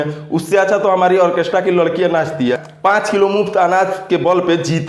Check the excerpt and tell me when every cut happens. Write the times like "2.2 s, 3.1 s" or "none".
2.7 s

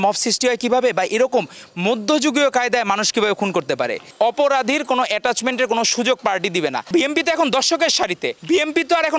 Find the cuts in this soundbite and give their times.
4.0 s, 6.8 s, 8.3 s

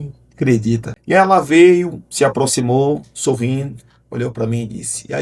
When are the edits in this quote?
0.9 s

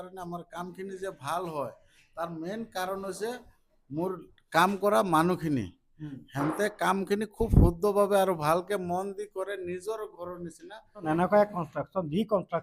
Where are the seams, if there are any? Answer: 11.0 s

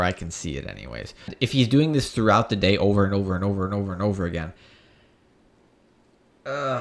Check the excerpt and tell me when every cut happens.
1.4 s

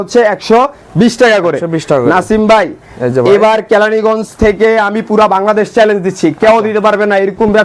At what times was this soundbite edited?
none

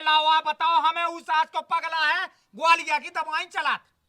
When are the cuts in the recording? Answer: none

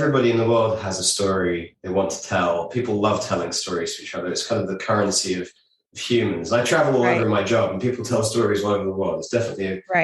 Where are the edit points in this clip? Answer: 1.7 s

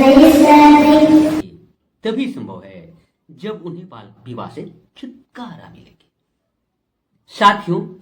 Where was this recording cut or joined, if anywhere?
1.4 s

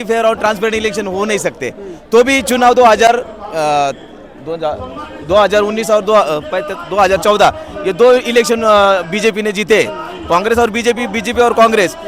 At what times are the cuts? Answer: none

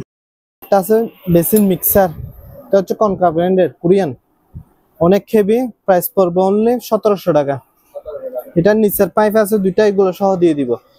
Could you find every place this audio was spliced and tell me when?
none

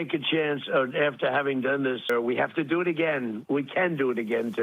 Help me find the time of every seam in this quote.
2.1 s

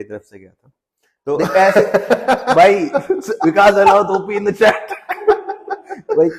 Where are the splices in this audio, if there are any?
none

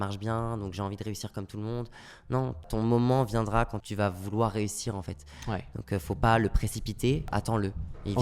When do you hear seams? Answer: 2.7 s, 3.8 s, 7.3 s

